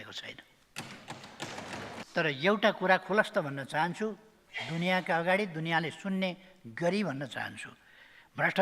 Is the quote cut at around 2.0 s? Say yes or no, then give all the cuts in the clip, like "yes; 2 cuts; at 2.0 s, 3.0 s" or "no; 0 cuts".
yes; 1 cut; at 2.0 s